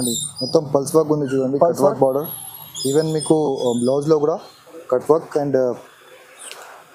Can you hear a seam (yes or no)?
no